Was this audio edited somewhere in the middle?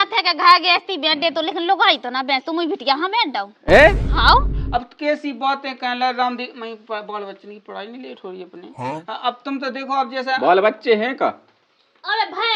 yes; 1 cut; at 4.5 s

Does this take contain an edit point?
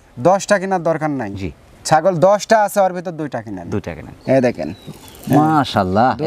yes; 1 cut; at 4.1 s

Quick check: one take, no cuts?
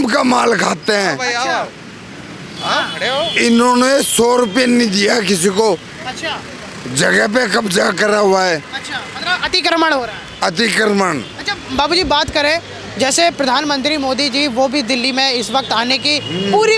yes; 0 cuts

